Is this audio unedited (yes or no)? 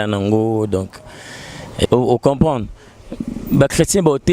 no